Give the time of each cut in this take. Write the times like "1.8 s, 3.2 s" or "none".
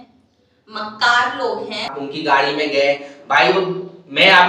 2.0 s

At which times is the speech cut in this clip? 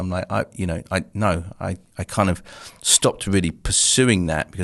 none

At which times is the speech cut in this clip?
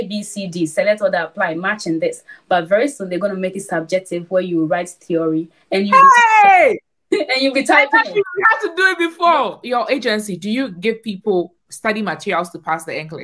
9.6 s

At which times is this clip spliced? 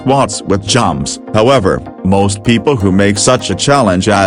1.2 s

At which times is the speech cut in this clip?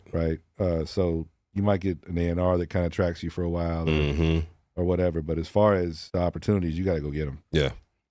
6.0 s

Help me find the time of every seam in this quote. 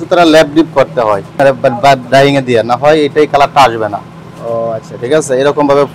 1.3 s

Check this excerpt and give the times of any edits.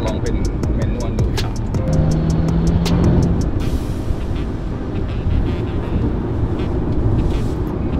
none

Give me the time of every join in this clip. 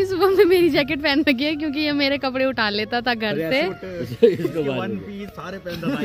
3.9 s

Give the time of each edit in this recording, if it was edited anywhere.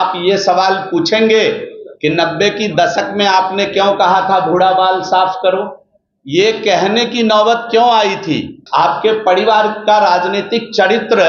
8.5 s

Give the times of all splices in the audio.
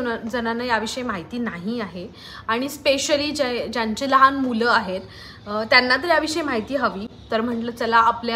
none

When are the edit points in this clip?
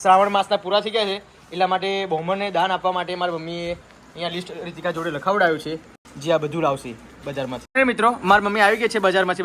7.6 s

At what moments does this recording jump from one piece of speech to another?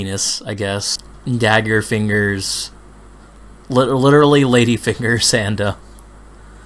1.0 s

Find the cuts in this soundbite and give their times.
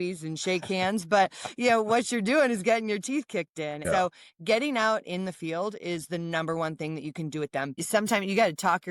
3.8 s, 7.7 s

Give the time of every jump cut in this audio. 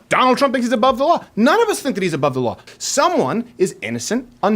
2.6 s

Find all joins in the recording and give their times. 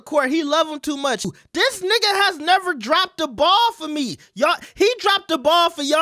1.3 s

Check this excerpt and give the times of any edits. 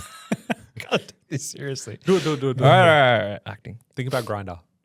none

